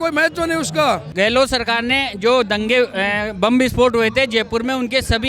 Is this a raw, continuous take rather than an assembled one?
no; 1 cut; at 1.1 s

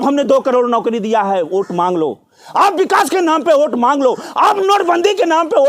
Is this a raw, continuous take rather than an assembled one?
yes; 0 cuts

